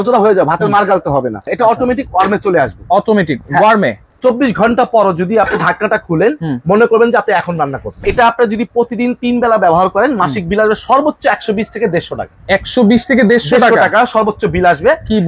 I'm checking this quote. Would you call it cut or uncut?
cut